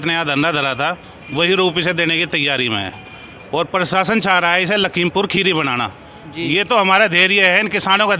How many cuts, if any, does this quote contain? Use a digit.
0